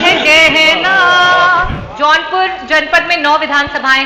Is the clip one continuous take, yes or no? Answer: no